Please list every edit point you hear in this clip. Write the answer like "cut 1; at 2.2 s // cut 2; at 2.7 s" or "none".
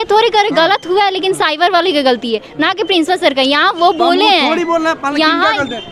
none

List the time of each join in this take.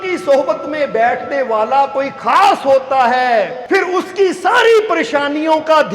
cut 1; at 3.6 s

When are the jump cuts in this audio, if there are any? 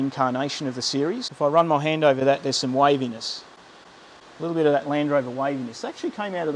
cut 1; at 1.3 s

